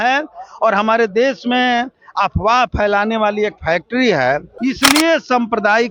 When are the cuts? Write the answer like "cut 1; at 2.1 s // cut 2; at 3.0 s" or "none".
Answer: cut 1; at 4.5 s